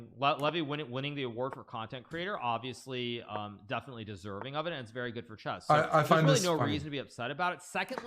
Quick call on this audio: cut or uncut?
cut